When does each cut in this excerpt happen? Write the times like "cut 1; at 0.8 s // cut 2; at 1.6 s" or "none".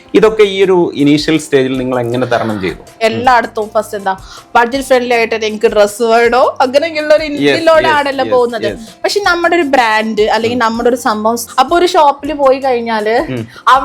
cut 1; at 2.9 s // cut 2; at 11.5 s